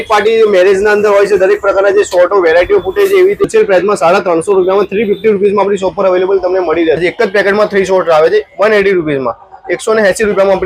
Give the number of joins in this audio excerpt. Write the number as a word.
two